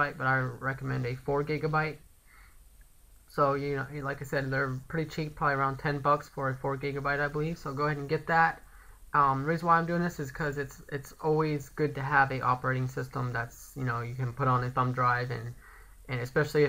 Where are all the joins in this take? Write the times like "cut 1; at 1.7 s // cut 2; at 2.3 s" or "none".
cut 1; at 5.1 s